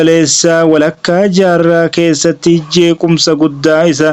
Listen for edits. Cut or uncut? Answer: uncut